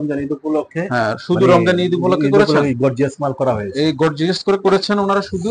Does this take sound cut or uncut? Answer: uncut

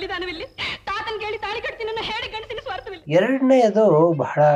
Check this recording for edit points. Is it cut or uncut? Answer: uncut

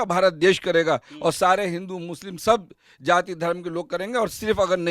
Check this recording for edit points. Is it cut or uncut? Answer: uncut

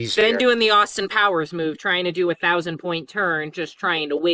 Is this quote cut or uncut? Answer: uncut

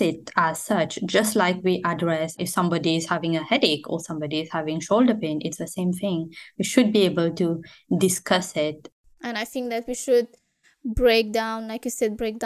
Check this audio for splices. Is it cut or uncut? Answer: cut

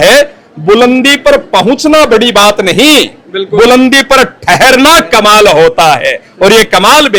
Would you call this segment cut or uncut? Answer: uncut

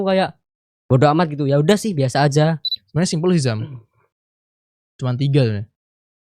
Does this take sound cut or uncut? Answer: cut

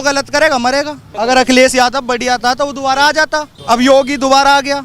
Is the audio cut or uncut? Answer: cut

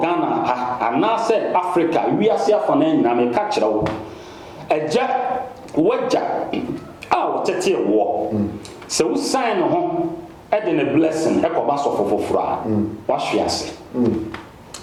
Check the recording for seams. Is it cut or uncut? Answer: uncut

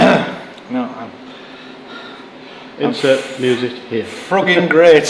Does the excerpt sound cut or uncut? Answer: uncut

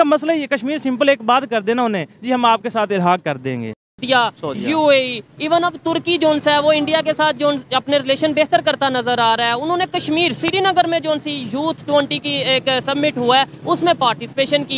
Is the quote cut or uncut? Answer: cut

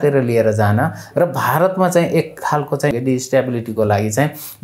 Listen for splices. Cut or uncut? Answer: cut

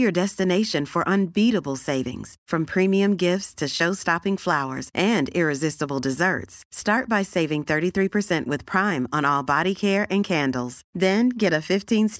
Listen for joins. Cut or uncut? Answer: uncut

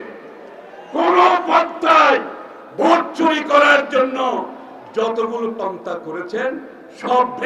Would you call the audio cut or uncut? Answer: uncut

